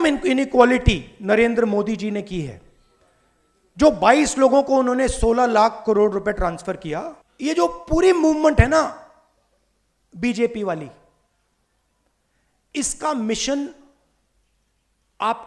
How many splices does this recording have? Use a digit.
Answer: 1